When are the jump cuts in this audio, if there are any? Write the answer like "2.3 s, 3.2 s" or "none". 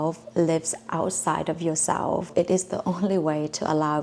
2.3 s